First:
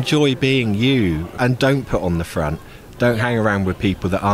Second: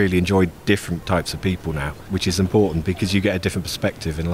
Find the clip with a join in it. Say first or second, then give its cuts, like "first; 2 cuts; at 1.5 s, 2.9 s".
first; 1 cut; at 1.3 s